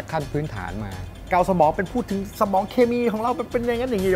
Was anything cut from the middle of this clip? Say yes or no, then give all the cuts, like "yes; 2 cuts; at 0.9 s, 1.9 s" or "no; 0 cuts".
yes; 1 cut; at 1.2 s